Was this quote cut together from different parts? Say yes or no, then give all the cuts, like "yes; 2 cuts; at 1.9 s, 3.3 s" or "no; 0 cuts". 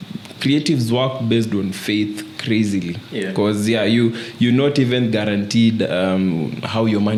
no; 0 cuts